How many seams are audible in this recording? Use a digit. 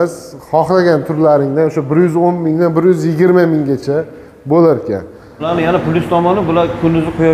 1